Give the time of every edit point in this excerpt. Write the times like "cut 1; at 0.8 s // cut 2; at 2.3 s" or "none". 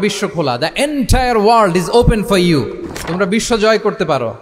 none